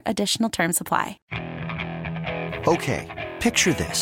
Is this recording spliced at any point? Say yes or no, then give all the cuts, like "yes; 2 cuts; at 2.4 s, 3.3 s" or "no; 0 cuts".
yes; 1 cut; at 1.2 s